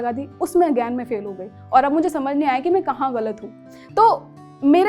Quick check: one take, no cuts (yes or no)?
yes